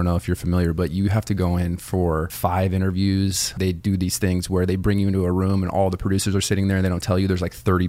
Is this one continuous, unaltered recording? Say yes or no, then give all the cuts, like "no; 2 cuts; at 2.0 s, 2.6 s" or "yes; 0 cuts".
no; 2 cuts; at 2.3 s, 3.5 s